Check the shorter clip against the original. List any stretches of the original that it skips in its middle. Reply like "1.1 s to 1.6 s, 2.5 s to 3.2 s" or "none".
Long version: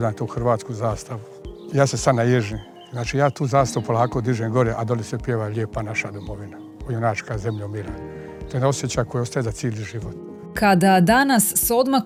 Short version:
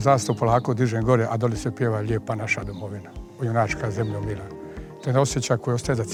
none